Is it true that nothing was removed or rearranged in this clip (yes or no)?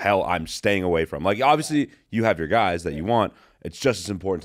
yes